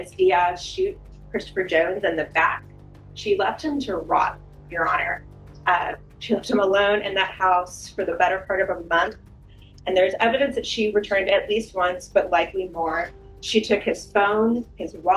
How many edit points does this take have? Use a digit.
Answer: 0